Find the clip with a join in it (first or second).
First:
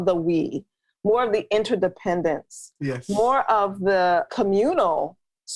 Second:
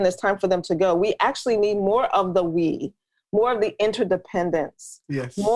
first